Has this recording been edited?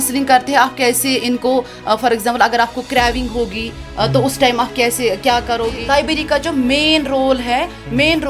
yes; 1 cut; at 5.7 s

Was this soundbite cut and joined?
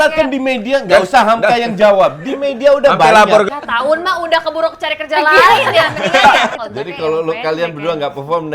yes; 2 cuts; at 3.5 s, 6.5 s

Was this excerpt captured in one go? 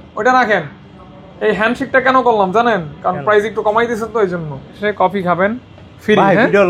no; 1 cut; at 4.8 s

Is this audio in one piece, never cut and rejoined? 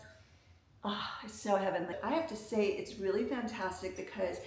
no; 1 cut; at 1.9 s

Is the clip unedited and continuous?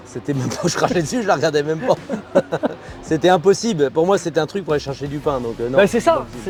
yes; 0 cuts

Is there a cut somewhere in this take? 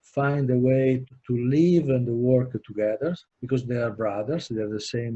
yes; 1 cut; at 3.3 s

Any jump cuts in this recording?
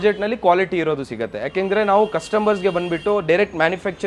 no; 0 cuts

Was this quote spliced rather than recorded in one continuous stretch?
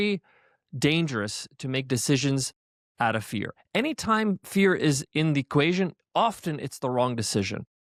no; 0 cuts

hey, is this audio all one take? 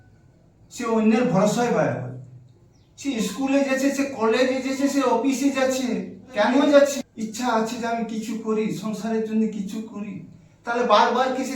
no; 1 cut; at 7.0 s

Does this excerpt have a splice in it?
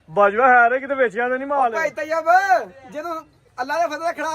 no; 0 cuts

